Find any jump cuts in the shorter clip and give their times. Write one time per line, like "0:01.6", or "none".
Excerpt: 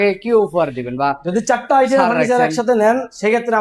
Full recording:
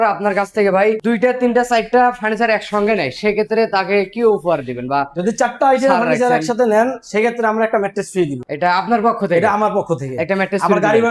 none

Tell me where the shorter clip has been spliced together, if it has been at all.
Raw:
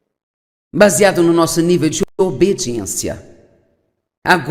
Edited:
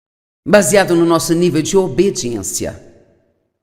0:01.8

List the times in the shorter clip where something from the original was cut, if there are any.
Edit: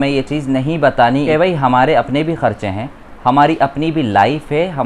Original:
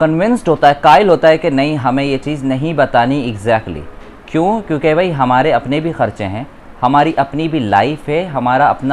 0:01.3

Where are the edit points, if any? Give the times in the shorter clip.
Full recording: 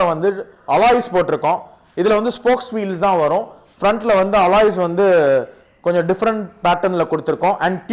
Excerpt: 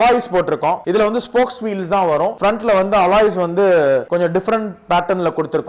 0:00.8
0:02.3
0:04.1

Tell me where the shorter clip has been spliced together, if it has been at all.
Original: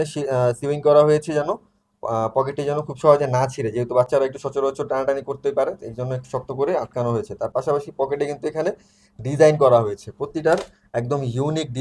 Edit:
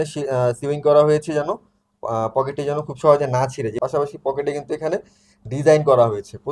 0:03.8

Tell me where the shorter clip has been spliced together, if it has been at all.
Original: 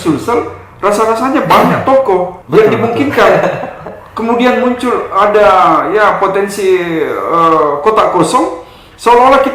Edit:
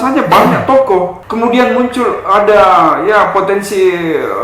0:01.2

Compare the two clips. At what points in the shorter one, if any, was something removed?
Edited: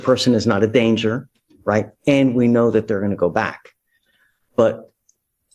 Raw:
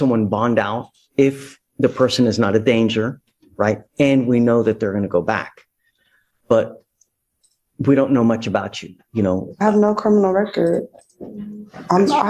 none

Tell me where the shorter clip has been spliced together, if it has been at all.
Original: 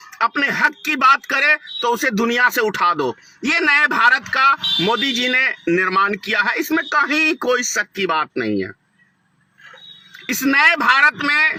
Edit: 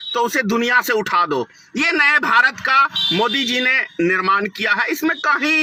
none

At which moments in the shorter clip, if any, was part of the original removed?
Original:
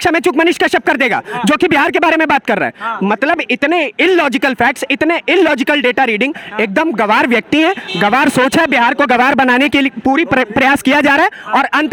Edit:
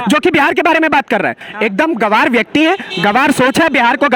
0:01.5

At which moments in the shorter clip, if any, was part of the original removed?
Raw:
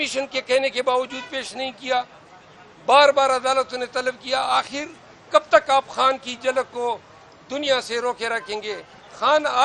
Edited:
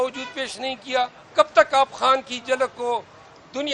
0:01.2

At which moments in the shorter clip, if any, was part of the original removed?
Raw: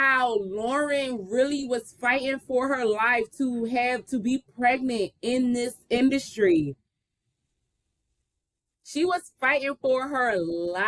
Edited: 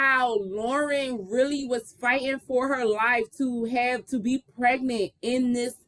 none

